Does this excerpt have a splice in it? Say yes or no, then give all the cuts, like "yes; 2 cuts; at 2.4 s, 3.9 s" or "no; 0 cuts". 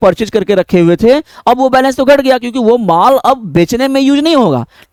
no; 0 cuts